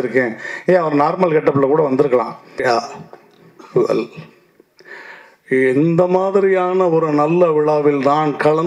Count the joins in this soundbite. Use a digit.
1